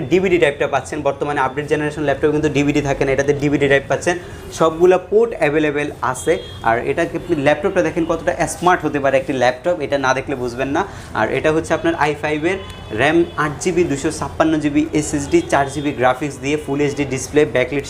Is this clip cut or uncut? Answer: uncut